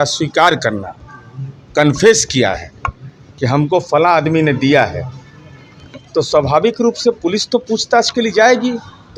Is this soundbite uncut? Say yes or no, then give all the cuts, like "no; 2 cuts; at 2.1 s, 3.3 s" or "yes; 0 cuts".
yes; 0 cuts